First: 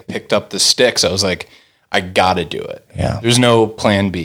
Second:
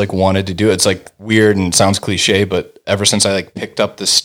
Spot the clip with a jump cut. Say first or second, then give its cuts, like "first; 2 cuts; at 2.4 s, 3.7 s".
second; 1 cut; at 1.1 s